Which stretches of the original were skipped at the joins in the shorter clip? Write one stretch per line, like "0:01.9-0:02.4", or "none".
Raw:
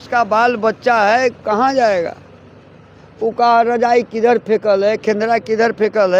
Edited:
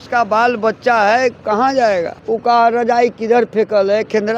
0:02.2-0:03.1